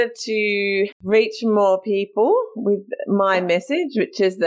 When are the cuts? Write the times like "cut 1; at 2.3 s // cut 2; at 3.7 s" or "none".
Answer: cut 1; at 1.0 s